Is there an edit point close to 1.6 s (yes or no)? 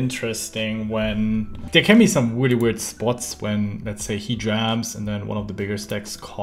yes